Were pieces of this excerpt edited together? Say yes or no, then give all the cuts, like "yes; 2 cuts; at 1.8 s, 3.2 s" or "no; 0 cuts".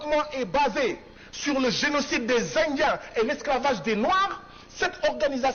no; 0 cuts